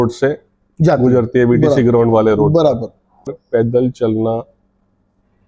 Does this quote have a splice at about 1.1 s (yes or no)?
no